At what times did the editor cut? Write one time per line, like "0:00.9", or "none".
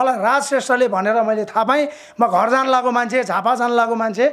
none